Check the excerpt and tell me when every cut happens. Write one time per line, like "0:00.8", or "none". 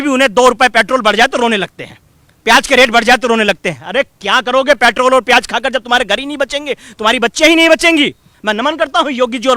0:08.3